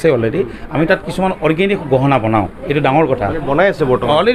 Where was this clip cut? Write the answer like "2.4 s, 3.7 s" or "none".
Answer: none